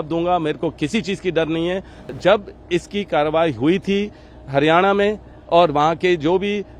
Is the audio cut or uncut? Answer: cut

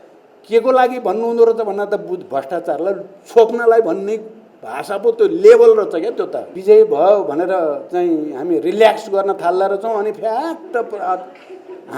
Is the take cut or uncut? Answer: cut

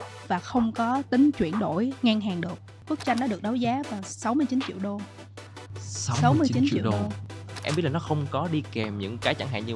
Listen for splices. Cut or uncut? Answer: cut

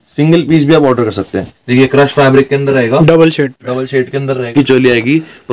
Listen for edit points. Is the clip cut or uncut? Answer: cut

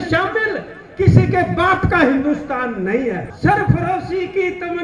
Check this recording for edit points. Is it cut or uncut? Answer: cut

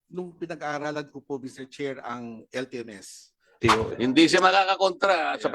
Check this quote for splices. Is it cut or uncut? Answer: cut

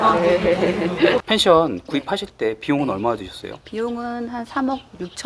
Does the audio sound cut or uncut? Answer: cut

